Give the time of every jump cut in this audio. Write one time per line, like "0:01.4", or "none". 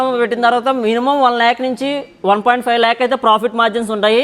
none